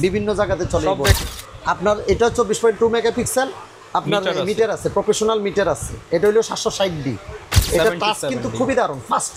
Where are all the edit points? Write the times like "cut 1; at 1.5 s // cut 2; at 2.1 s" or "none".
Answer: cut 1; at 1.1 s // cut 2; at 7.6 s